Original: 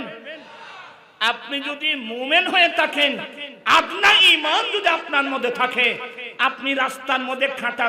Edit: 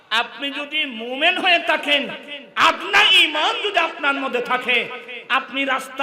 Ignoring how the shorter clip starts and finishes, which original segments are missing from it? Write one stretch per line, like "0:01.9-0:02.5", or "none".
none